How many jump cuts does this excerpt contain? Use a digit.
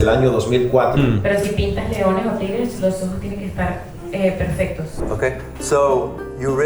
2